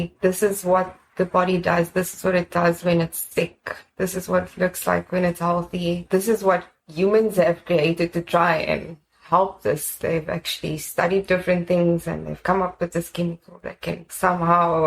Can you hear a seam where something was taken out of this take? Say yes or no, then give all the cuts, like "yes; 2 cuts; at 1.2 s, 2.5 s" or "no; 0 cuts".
no; 0 cuts